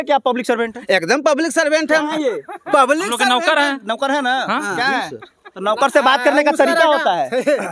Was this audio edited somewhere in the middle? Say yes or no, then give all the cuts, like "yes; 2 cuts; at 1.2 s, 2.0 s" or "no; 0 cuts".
no; 0 cuts